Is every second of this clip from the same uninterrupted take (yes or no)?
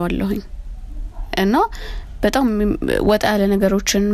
yes